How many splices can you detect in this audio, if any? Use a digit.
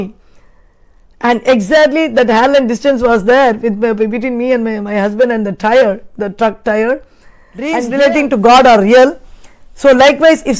1